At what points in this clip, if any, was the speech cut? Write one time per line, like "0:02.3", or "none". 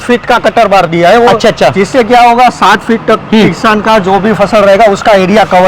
none

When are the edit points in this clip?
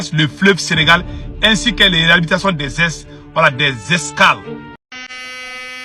0:04.8

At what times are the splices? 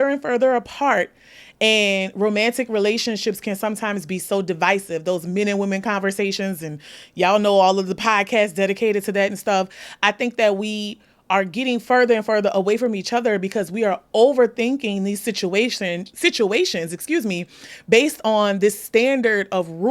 none

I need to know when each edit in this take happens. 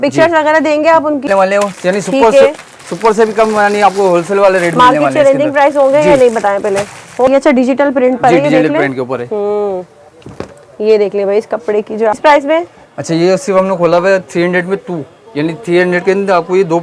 0:01.2
0:07.3
0:12.2

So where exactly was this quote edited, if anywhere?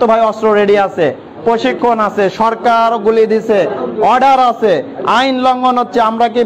none

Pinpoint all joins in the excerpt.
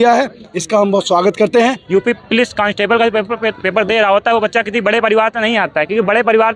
0:01.8

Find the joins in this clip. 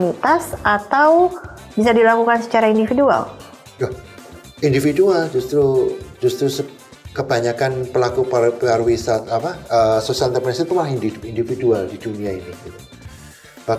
none

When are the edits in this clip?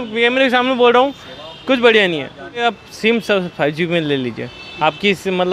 0:02.6

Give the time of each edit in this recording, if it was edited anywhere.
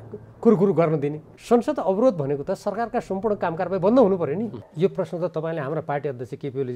0:01.3
0:04.6

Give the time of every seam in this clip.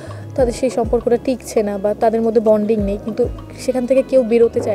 none

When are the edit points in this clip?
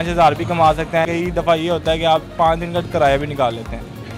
0:01.0

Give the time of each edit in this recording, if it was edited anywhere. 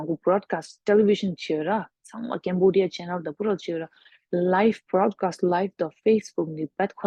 none

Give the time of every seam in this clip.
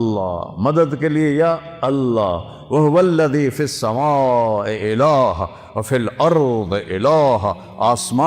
none

